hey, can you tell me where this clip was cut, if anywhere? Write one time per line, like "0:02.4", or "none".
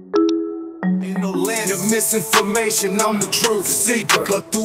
0:01.2